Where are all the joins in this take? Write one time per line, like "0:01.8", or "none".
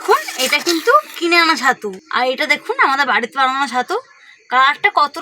0:01.9